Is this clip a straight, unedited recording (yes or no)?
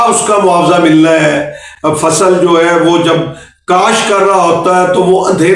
yes